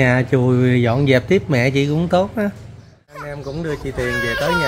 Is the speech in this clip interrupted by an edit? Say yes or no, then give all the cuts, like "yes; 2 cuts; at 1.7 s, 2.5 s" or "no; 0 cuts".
yes; 1 cut; at 3.3 s